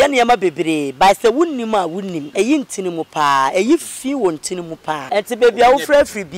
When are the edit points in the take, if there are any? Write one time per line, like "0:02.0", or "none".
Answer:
0:02.2
0:05.0